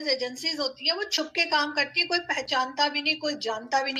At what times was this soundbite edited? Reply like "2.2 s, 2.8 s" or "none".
none